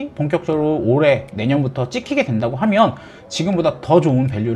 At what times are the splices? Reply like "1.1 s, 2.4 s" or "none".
none

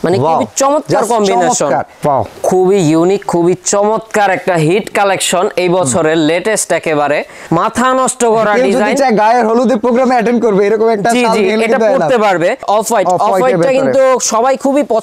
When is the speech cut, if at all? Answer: 1.9 s, 7.3 s, 12.6 s

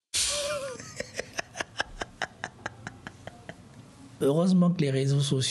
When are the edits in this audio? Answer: 4.1 s

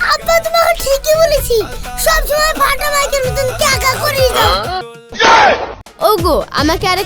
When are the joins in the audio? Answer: 5.0 s, 5.8 s

